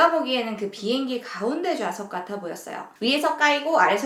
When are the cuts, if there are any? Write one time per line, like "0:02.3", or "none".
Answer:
none